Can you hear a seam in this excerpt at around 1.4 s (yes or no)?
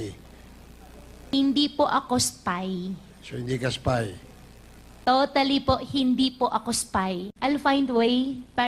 no